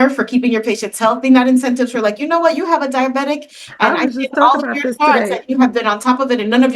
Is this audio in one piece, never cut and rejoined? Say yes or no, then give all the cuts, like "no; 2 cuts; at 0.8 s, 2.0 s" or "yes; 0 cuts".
yes; 0 cuts